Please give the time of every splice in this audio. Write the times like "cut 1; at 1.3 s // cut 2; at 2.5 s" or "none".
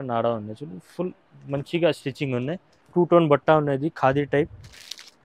cut 1; at 2.7 s